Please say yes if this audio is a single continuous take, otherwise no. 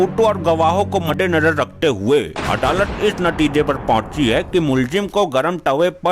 no